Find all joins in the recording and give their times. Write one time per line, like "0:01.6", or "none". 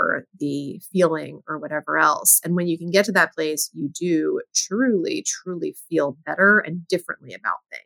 none

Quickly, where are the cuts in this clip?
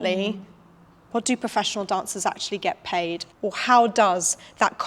none

